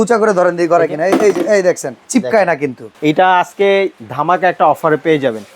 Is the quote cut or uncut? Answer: cut